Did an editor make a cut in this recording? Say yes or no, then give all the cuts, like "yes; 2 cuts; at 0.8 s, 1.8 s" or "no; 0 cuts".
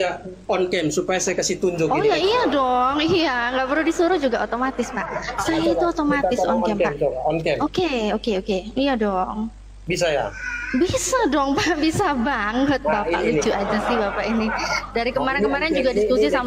no; 0 cuts